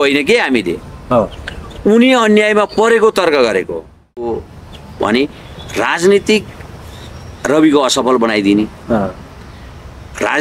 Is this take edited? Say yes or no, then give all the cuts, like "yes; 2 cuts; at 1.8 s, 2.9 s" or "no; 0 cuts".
yes; 1 cut; at 4.2 s